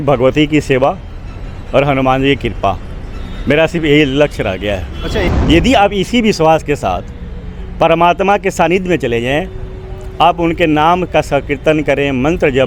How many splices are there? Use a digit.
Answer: 1